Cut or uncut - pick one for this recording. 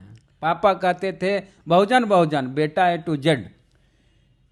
uncut